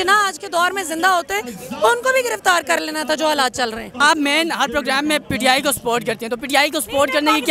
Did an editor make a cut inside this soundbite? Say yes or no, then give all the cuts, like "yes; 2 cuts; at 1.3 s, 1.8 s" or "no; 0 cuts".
yes; 1 cut; at 3.9 s